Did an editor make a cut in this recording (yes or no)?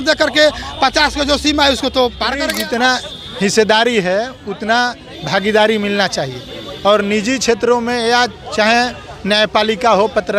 yes